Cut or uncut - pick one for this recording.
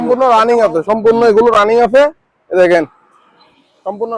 uncut